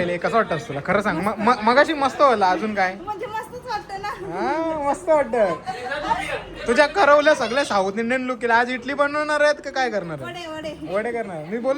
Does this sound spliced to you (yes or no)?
no